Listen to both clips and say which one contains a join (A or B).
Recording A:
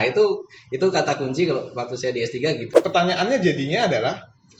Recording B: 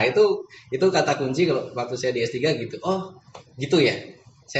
A